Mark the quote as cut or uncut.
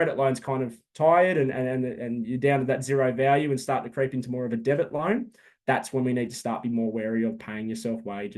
uncut